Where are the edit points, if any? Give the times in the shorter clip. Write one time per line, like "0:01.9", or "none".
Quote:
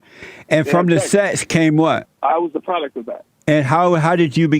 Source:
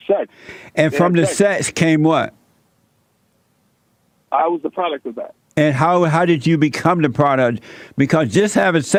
0:02.1